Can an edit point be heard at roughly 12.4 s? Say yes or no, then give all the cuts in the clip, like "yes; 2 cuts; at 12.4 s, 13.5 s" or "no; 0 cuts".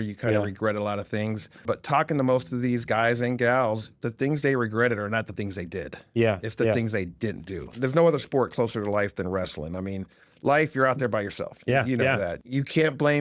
yes; 3 cuts; at 1.6 s, 7.7 s, 12.4 s